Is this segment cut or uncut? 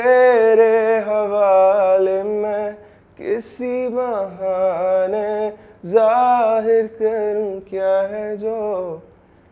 uncut